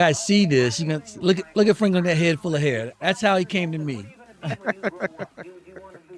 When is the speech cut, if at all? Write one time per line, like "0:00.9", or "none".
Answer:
none